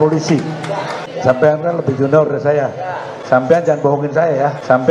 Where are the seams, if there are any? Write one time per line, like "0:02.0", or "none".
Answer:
0:01.0